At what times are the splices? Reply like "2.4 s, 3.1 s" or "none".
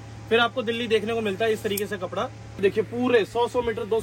2.6 s